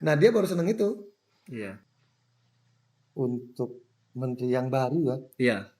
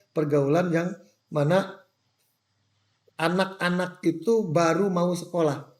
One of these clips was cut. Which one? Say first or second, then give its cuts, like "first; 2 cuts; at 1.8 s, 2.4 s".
first; 1 cut; at 1.9 s